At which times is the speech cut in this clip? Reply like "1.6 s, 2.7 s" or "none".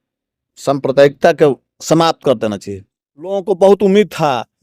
3.4 s